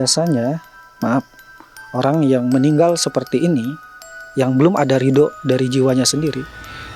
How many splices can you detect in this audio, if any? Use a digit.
0